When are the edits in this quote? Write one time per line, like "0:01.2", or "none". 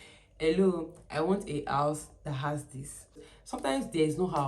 0:03.3